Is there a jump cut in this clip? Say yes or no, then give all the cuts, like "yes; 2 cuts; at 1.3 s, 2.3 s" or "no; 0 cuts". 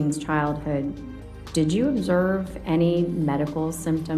no; 0 cuts